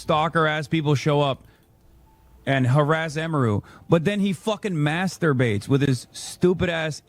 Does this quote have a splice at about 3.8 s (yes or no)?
yes